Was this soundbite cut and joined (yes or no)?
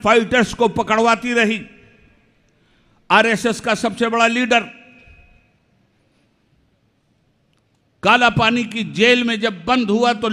no